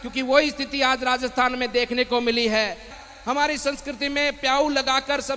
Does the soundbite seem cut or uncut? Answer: cut